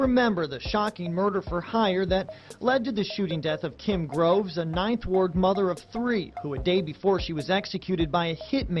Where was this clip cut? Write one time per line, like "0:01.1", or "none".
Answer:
none